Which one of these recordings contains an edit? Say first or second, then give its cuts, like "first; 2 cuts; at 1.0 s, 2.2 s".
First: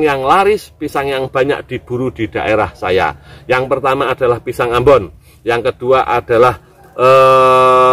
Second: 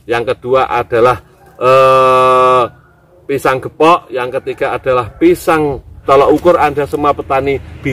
second; 1 cut; at 6.0 s